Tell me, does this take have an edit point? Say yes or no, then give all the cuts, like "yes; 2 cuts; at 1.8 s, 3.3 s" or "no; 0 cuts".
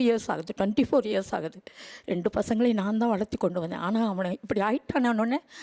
no; 0 cuts